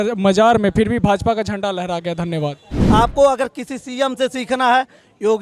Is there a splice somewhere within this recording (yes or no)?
yes